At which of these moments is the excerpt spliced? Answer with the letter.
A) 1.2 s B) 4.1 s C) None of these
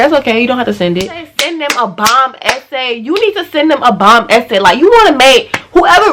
A